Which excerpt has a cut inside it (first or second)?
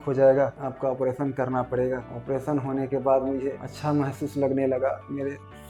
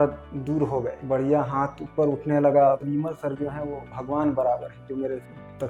second